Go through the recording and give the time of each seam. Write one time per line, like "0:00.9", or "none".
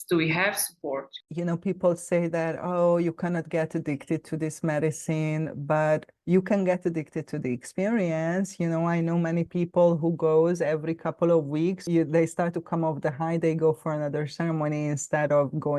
0:01.2
0:11.8